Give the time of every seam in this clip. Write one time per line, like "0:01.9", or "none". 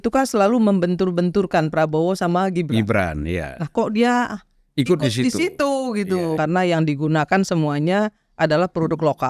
0:06.4